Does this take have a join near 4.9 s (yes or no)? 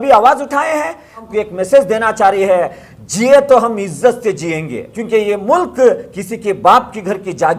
yes